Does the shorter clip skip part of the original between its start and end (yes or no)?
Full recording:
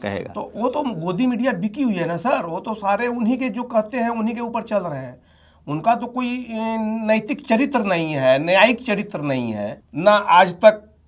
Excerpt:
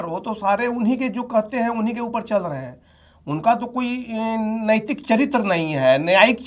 no